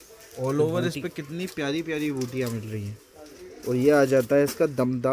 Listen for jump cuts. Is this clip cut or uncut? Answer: uncut